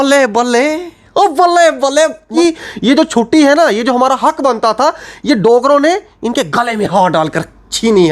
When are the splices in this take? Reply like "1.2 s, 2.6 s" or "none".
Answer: 2.3 s